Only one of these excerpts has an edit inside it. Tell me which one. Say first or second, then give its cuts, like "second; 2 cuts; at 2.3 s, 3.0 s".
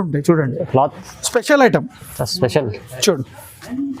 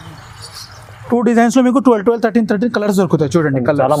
first; 1 cut; at 1.0 s